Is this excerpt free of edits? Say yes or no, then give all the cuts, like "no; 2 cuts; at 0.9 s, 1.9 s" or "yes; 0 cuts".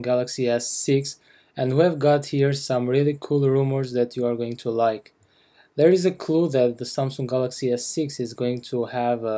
yes; 0 cuts